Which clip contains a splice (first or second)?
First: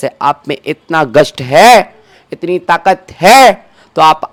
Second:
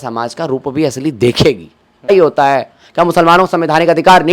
second